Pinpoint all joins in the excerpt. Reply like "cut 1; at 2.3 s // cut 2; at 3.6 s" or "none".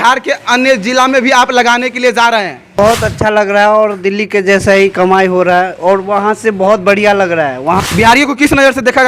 cut 1; at 2.8 s // cut 2; at 7.8 s